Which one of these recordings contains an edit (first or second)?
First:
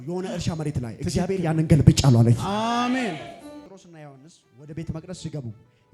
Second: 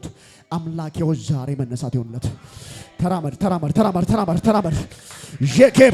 first